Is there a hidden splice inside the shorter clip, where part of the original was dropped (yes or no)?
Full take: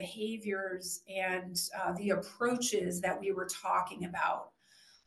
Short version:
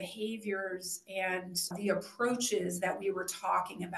yes